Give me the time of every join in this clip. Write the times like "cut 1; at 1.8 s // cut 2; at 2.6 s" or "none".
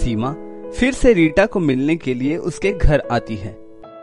none